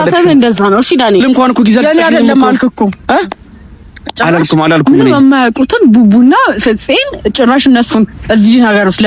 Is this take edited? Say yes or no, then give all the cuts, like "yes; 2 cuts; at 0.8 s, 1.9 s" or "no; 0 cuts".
yes; 1 cut; at 1.2 s